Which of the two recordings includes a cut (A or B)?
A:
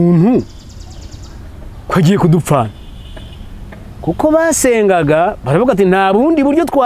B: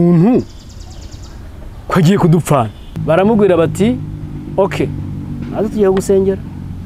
B